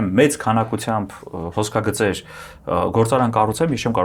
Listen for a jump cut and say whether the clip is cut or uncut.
uncut